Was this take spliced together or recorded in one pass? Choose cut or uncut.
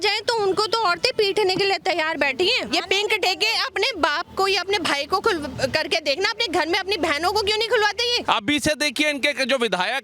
cut